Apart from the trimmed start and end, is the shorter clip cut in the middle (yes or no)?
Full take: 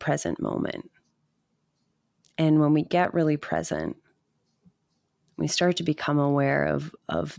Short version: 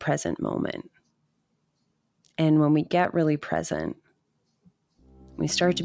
no